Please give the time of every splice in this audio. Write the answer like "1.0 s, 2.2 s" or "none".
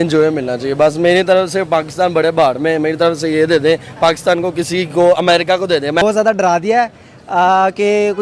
6.0 s

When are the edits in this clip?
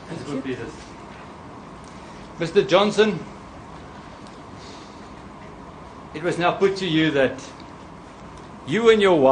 none

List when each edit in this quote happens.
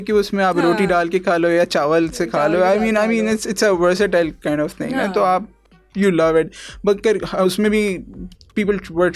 none

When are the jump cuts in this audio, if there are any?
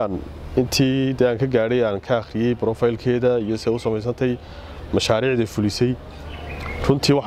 none

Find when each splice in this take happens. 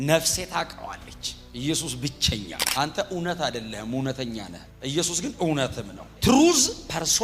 2.6 s

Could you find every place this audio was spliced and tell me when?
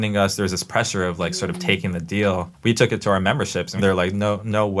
2.5 s, 3.8 s

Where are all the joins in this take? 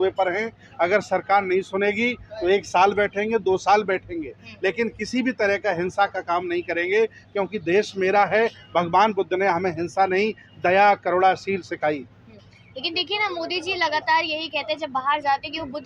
none

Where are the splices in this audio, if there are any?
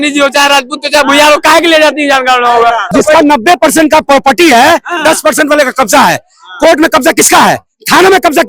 2.9 s

